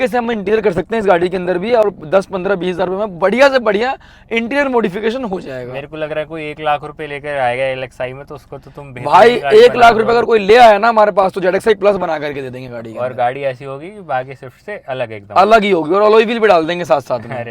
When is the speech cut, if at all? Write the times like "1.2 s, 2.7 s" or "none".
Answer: none

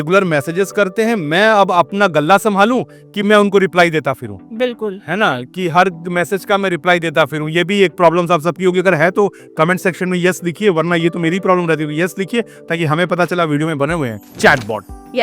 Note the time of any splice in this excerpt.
14.2 s

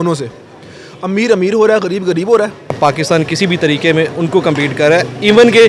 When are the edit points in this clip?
2.8 s

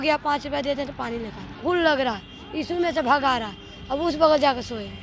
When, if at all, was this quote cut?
1.6 s

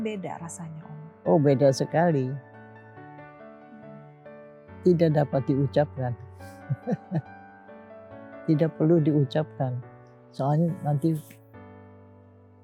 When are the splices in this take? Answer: none

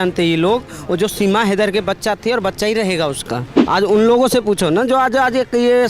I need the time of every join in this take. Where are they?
3.5 s

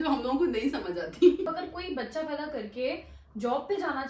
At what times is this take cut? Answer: 1.5 s

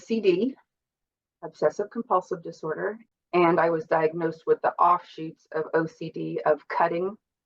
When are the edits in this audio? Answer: 3.0 s

